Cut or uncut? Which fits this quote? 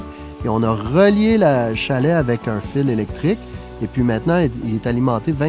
uncut